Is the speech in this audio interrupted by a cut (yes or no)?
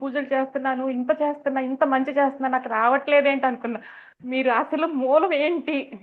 no